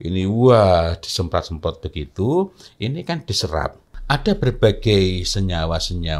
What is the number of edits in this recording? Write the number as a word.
one